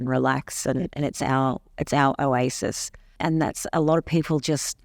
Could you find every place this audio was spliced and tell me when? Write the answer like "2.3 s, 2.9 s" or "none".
3.1 s